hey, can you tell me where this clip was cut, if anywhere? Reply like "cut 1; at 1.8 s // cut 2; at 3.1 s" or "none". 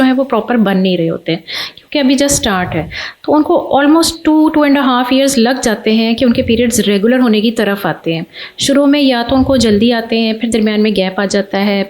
none